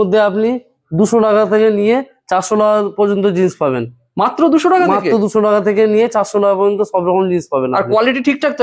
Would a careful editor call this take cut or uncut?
uncut